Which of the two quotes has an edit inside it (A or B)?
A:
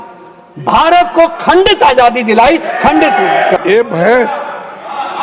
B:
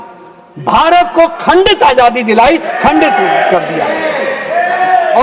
A